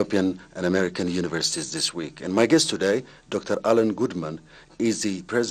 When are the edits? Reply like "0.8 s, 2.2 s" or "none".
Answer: 1.6 s